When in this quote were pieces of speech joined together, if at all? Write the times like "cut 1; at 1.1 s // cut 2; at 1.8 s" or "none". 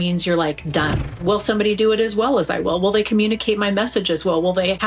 cut 1; at 1.0 s

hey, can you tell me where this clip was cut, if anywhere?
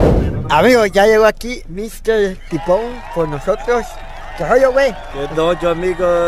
none

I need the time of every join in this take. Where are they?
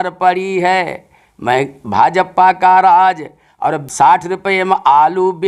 cut 1; at 3.9 s

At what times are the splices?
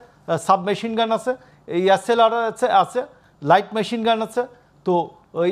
none

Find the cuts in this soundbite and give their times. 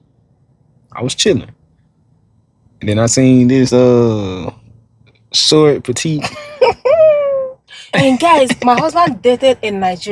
cut 1; at 7.8 s

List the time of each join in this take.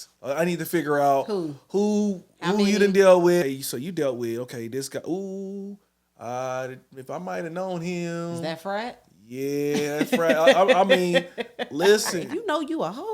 cut 1; at 3.4 s // cut 2; at 12.2 s

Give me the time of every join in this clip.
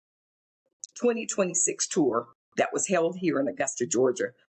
cut 1; at 2.4 s

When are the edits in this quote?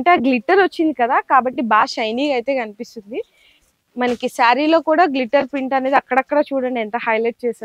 none

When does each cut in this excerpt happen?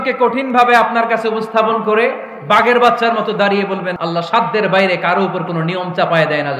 cut 1; at 3.9 s

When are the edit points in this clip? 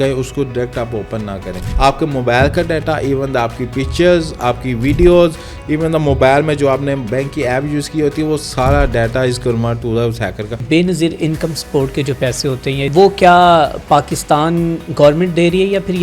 cut 1; at 1.6 s // cut 2; at 10.6 s // cut 3; at 12.9 s

